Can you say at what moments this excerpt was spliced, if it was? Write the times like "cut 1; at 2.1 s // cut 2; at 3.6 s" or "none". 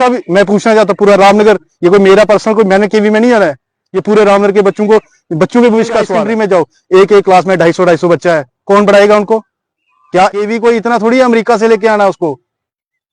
cut 1; at 6.2 s // cut 2; at 10.3 s